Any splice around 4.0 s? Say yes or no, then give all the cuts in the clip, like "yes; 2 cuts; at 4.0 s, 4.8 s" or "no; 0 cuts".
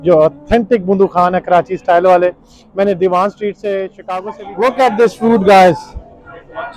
yes; 1 cut; at 4.0 s